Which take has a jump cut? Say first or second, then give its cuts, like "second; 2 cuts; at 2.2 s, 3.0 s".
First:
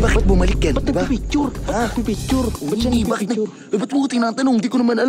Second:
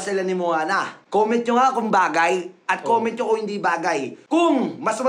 second; 2 cuts; at 1.0 s, 4.1 s